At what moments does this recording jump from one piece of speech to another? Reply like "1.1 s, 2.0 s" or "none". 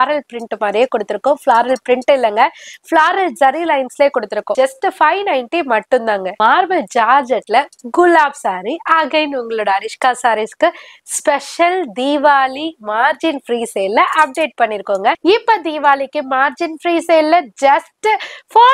4.5 s, 15.2 s